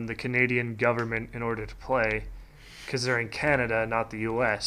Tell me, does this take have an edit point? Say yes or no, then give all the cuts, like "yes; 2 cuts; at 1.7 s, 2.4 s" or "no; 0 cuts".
no; 0 cuts